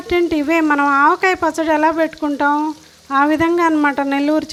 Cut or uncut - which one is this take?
uncut